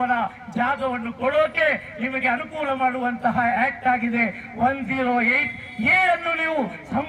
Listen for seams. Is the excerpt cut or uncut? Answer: uncut